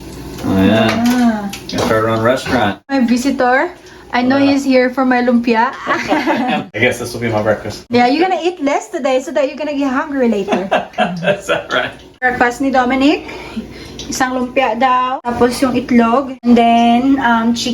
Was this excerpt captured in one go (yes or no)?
no